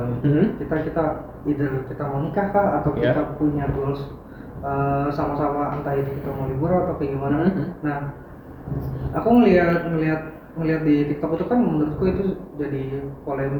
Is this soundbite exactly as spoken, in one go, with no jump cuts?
yes; 0 cuts

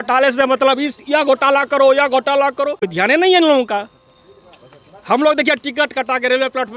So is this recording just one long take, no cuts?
no; 1 cut; at 2.8 s

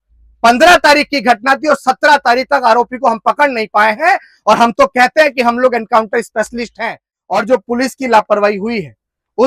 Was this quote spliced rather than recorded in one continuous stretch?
yes; 1 cut; at 7.1 s

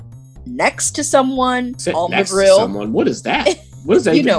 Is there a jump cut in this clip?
yes; 1 cut; at 1.8 s

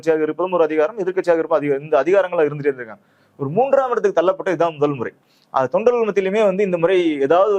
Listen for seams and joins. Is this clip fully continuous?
yes; 0 cuts

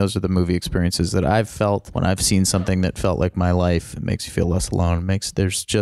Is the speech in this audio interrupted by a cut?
yes; 1 cut; at 1.9 s

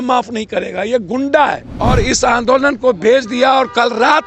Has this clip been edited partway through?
yes; 1 cut; at 1.7 s

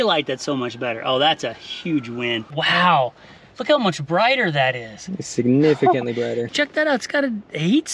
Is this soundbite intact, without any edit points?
no; 2 cuts; at 2.5 s, 6.5 s

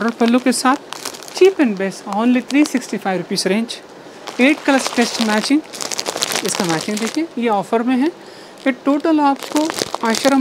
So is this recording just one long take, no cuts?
yes; 0 cuts

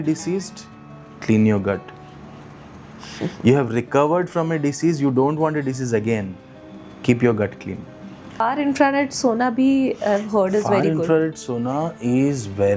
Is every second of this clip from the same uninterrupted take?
no; 1 cut; at 8.4 s

